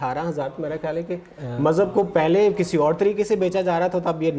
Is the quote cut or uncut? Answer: uncut